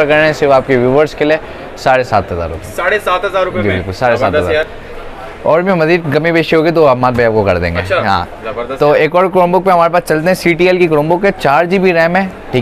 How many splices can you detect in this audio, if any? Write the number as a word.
zero